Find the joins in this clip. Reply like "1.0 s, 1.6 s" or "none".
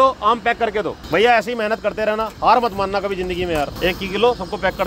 1.0 s, 3.7 s